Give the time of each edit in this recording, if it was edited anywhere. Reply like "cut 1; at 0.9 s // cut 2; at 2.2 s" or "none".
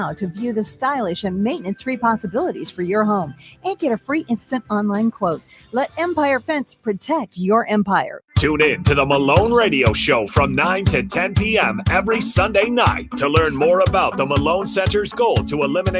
cut 1; at 7.9 s